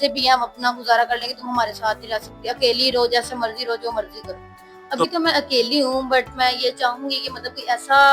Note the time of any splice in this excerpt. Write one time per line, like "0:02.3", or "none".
0:05.0